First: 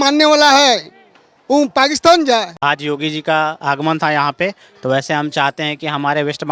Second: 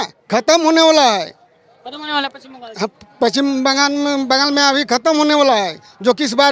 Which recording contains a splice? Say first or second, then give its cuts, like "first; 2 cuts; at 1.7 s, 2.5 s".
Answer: first; 1 cut; at 2.5 s